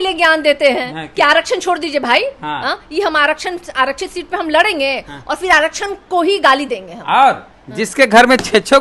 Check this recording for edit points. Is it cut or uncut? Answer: uncut